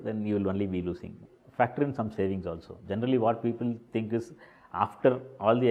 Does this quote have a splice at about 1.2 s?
yes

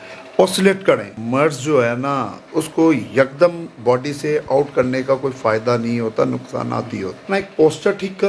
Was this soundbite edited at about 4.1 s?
no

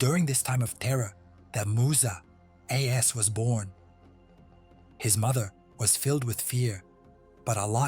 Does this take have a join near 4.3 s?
no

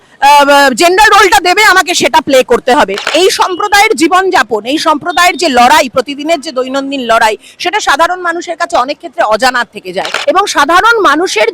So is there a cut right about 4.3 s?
no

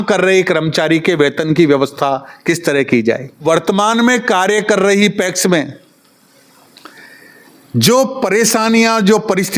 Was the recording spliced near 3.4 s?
yes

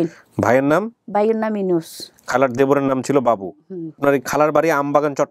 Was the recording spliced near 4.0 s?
yes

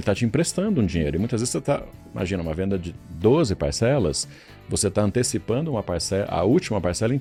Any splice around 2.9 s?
no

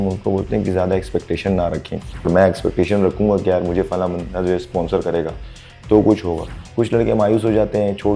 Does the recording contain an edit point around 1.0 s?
no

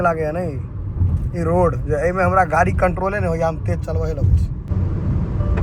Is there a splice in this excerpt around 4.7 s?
yes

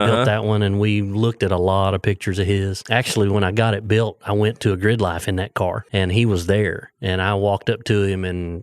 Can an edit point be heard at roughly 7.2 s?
no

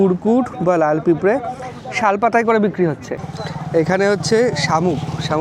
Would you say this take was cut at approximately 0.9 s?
no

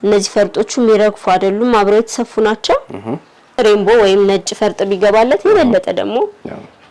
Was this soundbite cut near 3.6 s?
yes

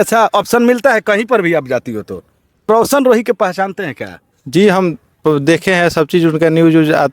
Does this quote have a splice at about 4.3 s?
no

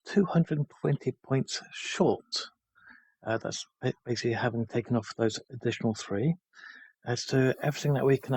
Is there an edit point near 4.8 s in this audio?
no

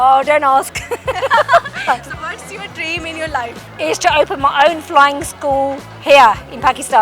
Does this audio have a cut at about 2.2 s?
yes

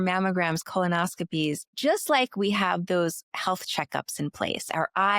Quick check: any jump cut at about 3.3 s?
no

